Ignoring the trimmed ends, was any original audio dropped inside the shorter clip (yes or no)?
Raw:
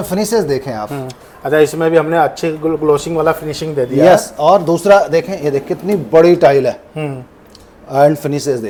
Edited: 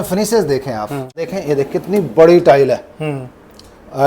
yes